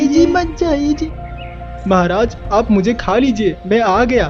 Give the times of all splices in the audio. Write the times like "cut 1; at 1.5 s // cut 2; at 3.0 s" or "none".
cut 1; at 1.0 s